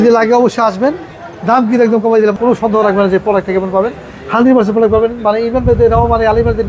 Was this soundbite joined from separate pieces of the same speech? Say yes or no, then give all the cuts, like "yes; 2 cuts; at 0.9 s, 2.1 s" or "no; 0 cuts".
yes; 1 cut; at 2.3 s